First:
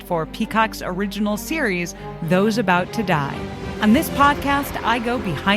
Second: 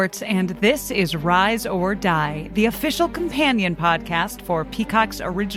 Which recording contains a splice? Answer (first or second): first